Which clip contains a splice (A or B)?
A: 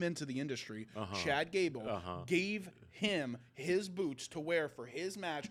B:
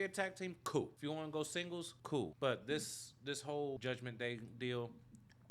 B